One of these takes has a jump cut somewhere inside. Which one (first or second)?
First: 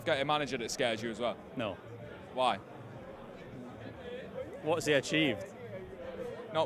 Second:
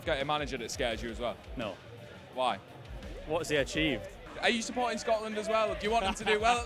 second